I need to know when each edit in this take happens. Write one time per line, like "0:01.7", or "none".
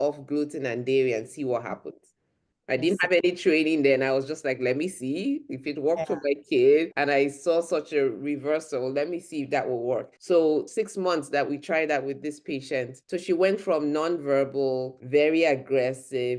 0:06.9
0:10.1
0:10.7
0:13.0
0:14.9